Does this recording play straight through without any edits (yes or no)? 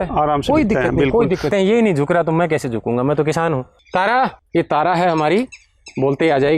no